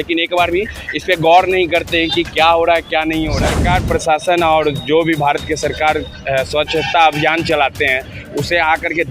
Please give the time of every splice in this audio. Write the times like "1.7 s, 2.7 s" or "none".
3.5 s